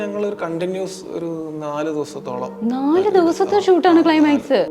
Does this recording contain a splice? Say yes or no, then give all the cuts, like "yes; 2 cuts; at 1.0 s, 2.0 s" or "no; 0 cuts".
no; 0 cuts